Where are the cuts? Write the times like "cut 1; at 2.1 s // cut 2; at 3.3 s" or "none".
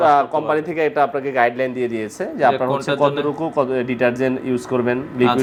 none

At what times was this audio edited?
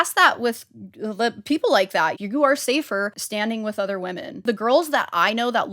cut 1; at 2.2 s // cut 2; at 3.2 s // cut 3; at 4.4 s

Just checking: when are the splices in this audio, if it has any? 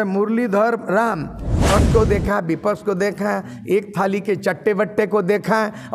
cut 1; at 1.6 s

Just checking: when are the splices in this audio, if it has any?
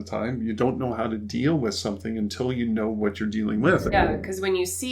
cut 1; at 3.9 s

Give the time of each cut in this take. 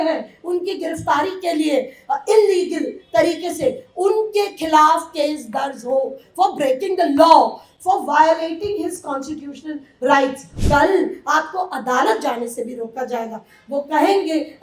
cut 1; at 10.5 s

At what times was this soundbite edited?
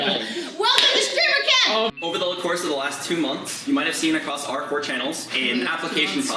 cut 1; at 1.9 s

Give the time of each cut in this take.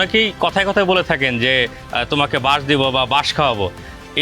none

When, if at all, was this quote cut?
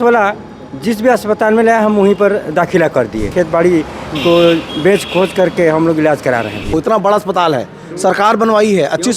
cut 1; at 3.3 s // cut 2; at 6.7 s

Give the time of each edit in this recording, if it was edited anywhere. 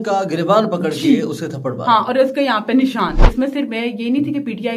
cut 1; at 3.2 s

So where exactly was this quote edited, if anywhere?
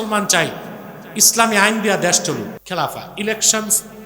cut 1; at 2.6 s

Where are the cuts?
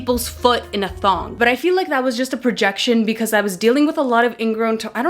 cut 1; at 1.3 s

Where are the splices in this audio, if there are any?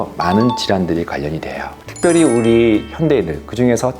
cut 1; at 1.8 s

